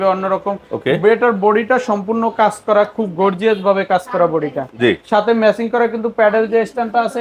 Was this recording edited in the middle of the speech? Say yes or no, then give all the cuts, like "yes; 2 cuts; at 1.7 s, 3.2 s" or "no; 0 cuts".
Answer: no; 0 cuts